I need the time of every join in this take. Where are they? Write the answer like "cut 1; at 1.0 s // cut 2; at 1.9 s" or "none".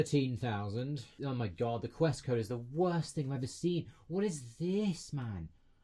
cut 1; at 1.1 s